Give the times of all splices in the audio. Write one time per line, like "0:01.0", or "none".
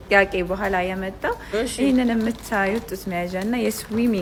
none